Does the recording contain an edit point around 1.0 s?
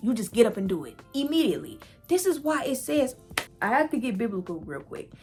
no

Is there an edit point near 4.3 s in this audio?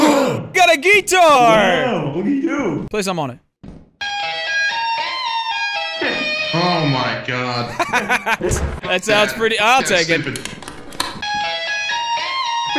no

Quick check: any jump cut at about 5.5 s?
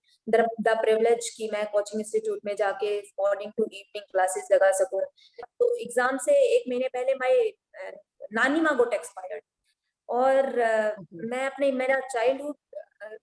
yes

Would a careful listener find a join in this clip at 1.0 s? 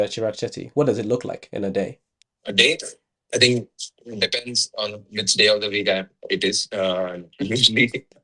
no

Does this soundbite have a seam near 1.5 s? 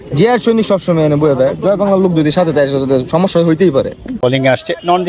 no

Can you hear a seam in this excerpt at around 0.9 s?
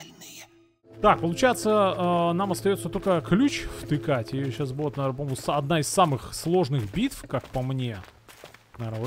yes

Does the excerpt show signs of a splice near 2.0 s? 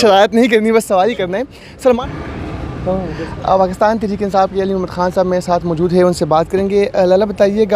yes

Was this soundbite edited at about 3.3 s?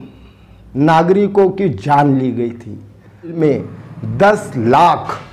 yes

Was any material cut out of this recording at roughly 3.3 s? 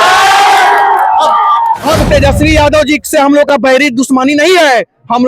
no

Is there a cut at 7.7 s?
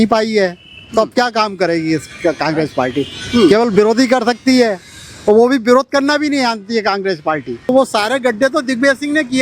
yes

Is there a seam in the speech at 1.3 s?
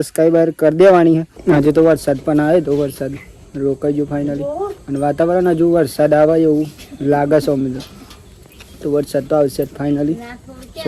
yes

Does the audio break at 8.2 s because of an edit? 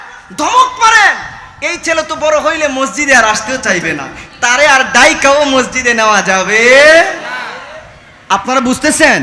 yes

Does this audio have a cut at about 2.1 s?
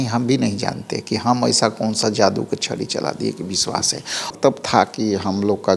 no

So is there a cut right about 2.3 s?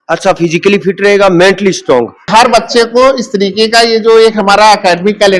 yes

